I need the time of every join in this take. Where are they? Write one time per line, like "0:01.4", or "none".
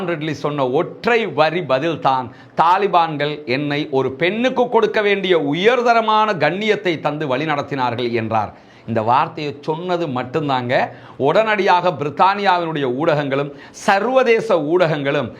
none

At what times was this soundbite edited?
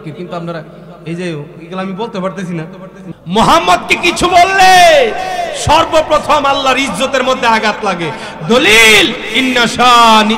0:03.0

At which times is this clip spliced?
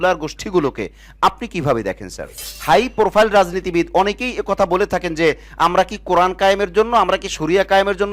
0:02.5

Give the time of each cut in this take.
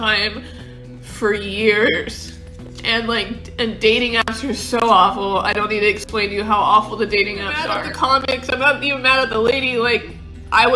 0:07.8

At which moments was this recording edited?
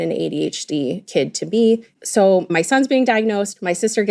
0:01.0
0:01.9

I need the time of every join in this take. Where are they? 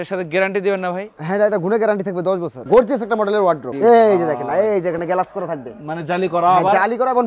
0:02.6
0:03.7

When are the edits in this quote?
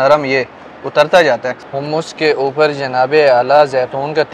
0:01.6

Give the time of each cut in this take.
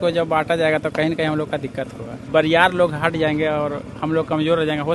0:02.2

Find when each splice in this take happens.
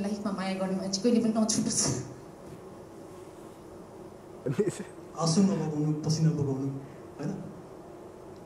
0:04.5

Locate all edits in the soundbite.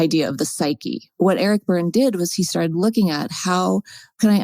0:01.0

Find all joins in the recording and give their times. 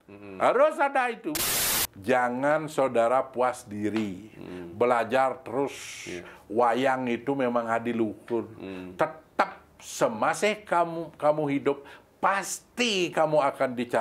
0:01.6

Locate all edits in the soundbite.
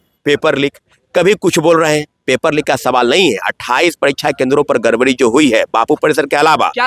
none

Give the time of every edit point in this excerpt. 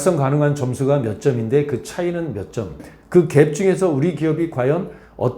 0:02.9

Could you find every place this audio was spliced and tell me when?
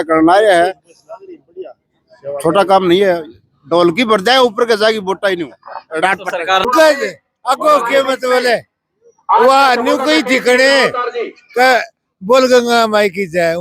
0:06.6

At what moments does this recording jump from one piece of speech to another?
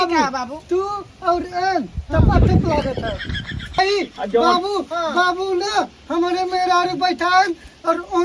0:03.2

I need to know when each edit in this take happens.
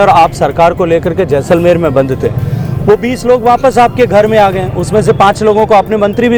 none

